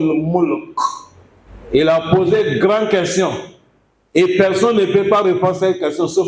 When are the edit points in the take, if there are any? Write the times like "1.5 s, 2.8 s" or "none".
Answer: none